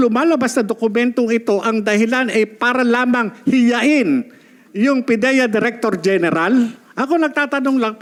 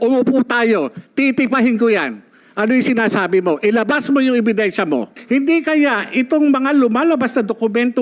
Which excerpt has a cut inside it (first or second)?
second